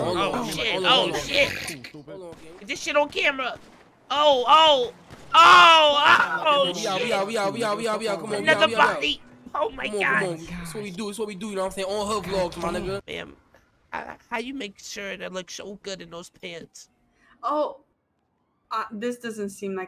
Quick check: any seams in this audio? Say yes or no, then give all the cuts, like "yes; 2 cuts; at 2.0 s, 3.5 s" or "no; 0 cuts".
yes; 1 cut; at 13.1 s